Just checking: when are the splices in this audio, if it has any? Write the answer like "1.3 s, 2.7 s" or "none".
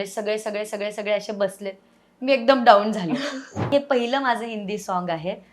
3.5 s